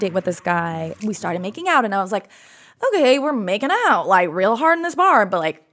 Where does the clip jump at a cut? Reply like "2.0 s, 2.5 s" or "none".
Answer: 1.0 s